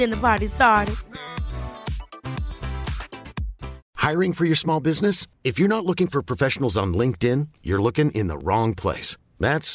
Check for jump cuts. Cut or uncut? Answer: cut